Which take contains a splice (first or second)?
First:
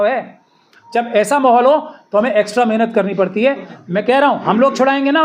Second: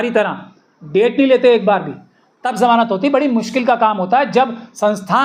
first